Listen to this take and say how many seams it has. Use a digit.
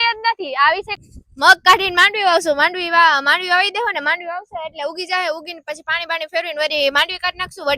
1